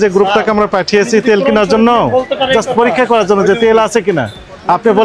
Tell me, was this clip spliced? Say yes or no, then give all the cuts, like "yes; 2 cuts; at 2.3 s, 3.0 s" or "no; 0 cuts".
no; 0 cuts